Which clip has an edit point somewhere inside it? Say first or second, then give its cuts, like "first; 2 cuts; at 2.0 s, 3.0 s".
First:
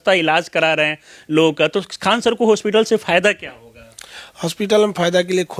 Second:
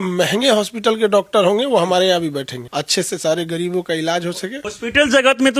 second; 2 cuts; at 2.6 s, 4.7 s